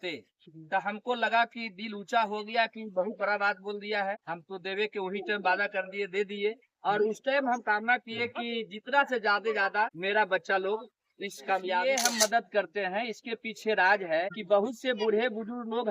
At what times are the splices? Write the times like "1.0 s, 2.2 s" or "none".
4.3 s, 10.0 s, 11.8 s, 14.4 s